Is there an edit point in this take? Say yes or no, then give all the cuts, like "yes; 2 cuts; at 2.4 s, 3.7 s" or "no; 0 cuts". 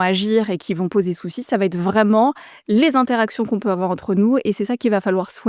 no; 0 cuts